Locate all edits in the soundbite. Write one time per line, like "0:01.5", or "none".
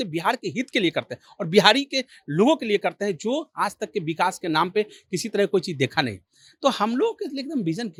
none